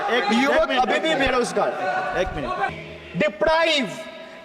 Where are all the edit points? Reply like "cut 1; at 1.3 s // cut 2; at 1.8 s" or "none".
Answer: cut 1; at 2.7 s